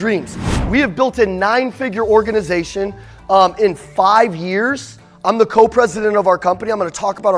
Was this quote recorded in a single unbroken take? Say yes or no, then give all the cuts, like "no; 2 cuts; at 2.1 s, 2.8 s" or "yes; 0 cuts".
yes; 0 cuts